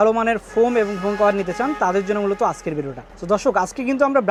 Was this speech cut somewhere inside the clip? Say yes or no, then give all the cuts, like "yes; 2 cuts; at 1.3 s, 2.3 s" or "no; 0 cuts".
no; 0 cuts